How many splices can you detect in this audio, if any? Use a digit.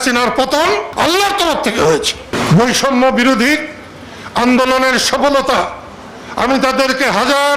2